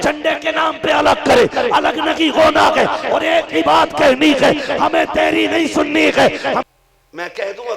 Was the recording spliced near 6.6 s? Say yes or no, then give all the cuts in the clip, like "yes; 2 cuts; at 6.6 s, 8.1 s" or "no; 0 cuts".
yes; 1 cut; at 6.6 s